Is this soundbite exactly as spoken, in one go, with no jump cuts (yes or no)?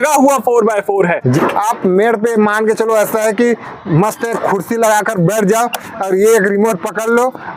no